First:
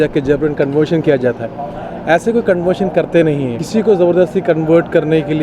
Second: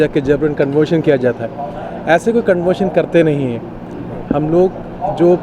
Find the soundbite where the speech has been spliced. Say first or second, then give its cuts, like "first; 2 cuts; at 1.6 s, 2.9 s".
first; 1 cut; at 3.6 s